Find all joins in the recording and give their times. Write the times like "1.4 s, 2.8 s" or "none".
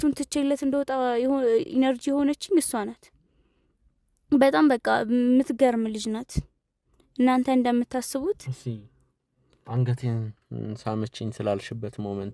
none